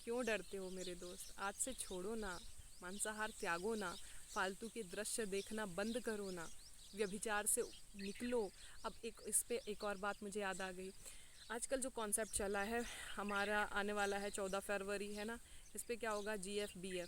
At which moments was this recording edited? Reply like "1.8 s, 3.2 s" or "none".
none